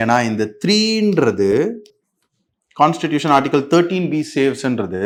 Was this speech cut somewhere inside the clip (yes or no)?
no